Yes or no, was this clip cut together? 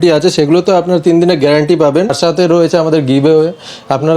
yes